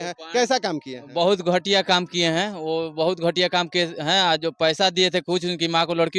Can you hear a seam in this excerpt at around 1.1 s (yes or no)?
no